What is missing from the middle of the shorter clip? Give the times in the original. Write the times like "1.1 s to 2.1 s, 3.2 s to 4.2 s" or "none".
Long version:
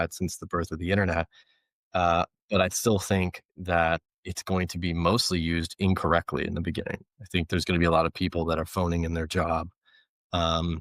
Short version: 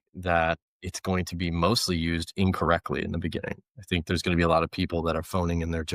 none